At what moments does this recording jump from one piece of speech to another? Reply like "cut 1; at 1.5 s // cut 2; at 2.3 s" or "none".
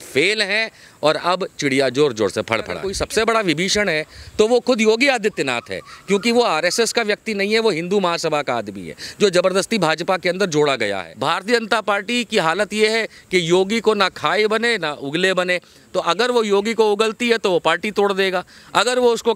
cut 1; at 2.9 s // cut 2; at 11.1 s